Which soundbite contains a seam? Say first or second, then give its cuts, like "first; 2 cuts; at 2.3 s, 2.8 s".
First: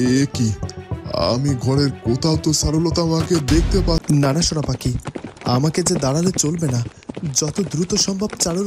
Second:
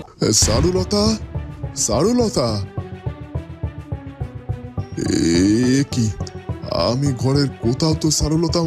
first; 1 cut; at 4.0 s